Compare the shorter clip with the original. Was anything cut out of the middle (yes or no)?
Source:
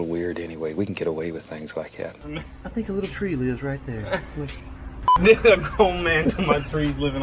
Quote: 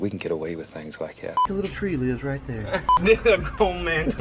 yes